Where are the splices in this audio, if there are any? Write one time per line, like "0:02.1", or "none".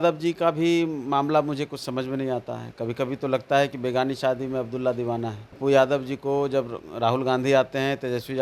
0:05.5